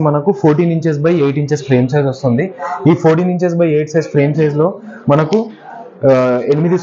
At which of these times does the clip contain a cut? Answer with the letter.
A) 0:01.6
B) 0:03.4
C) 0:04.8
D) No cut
D